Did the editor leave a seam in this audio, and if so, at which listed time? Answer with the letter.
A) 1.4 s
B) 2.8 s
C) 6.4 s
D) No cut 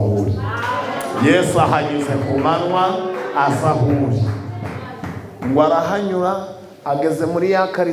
D